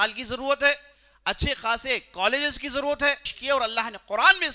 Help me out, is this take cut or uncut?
cut